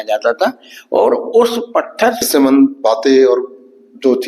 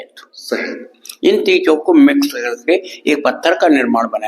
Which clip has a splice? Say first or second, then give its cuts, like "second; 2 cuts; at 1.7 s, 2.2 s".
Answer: first; 1 cut; at 2.2 s